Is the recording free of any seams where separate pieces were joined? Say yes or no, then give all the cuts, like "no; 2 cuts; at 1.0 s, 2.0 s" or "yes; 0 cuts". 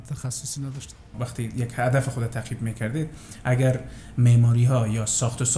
no; 1 cut; at 1.1 s